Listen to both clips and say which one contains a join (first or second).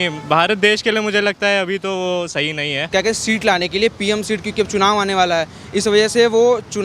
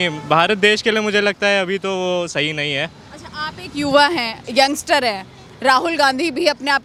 first